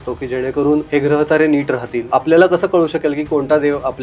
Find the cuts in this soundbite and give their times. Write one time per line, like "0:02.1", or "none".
0:00.9
0:02.1